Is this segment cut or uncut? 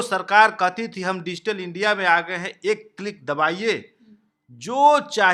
uncut